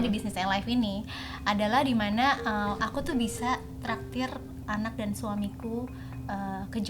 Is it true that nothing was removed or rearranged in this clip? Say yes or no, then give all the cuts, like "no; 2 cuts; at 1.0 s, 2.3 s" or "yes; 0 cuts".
yes; 0 cuts